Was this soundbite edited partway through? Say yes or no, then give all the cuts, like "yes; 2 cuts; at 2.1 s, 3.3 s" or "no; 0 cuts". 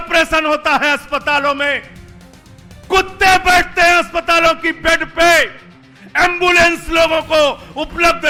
no; 0 cuts